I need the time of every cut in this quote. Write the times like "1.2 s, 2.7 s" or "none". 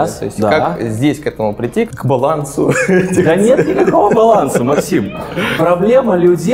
1.9 s